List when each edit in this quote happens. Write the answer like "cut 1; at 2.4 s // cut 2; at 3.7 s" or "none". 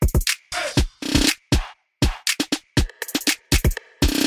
cut 1; at 1.0 s